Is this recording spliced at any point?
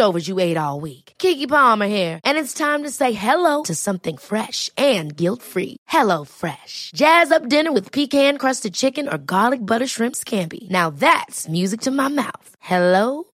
no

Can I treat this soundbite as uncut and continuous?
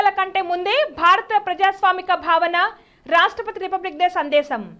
yes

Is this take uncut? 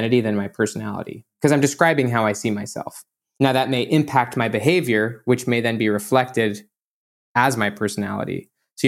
no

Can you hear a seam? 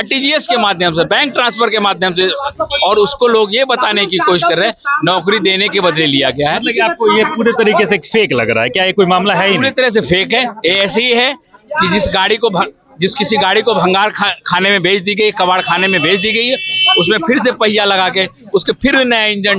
no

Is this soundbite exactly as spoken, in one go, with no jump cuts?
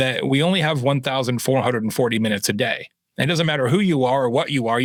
yes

